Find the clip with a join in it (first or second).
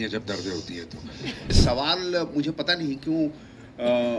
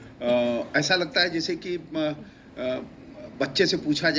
first